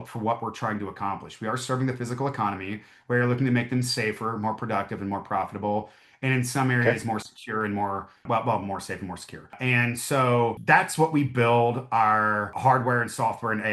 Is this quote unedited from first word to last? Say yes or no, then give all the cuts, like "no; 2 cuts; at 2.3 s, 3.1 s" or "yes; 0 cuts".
yes; 0 cuts